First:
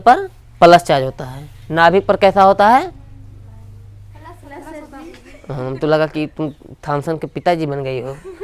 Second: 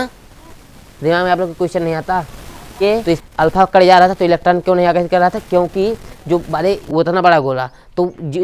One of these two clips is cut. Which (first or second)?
second